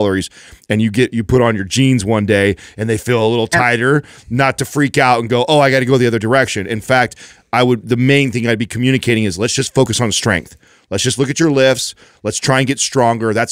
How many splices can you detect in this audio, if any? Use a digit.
0